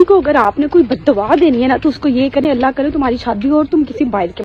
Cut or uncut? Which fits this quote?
uncut